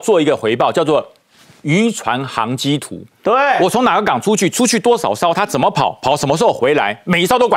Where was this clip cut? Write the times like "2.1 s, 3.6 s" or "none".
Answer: none